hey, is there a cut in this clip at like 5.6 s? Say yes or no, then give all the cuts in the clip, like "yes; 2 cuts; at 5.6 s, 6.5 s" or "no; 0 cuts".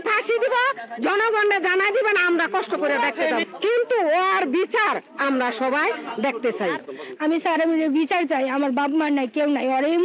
no; 2 cuts; at 3.4 s, 6.9 s